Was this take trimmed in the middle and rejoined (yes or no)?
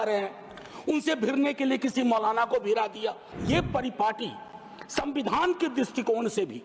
yes